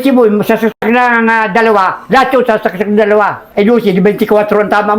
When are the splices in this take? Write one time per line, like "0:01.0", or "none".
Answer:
none